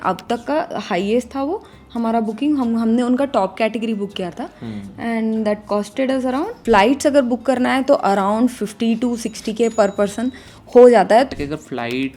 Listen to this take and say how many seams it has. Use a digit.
2